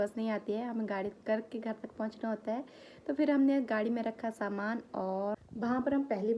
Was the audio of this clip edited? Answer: yes; 1 cut; at 5.5 s

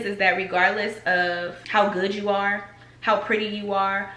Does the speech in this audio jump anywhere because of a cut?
no; 0 cuts

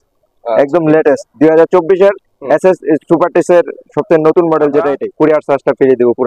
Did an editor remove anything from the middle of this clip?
yes; 1 cut; at 5.0 s

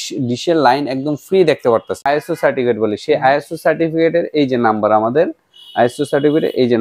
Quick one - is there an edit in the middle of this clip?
yes; 1 cut; at 2.0 s

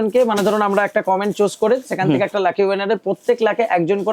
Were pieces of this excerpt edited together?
no; 0 cuts

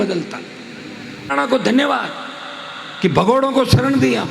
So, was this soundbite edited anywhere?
yes; 1 cut; at 1.3 s

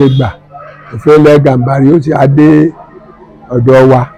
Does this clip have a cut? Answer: no; 0 cuts

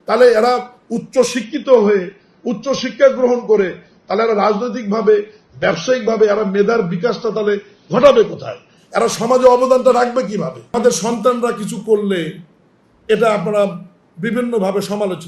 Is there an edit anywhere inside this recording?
yes; 1 cut; at 10.7 s

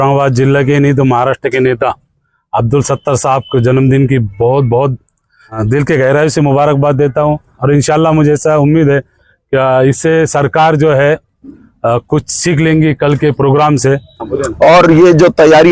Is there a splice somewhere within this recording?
yes; 3 cuts; at 5.6 s, 7.5 s, 14.4 s

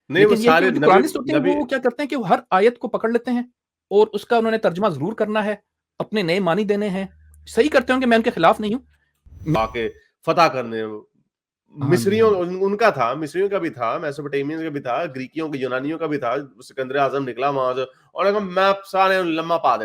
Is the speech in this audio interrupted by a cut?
yes; 1 cut; at 9.6 s

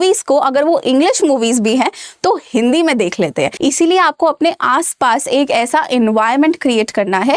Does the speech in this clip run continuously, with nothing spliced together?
no; 1 cut; at 3.5 s

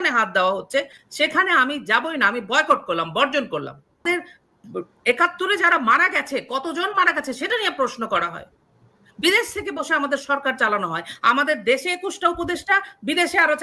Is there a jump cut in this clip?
yes; 1 cut; at 4.0 s

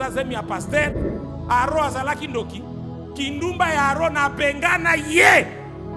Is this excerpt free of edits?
no; 1 cut; at 1.0 s

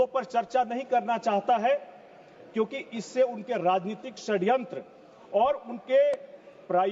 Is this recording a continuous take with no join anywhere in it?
yes; 0 cuts

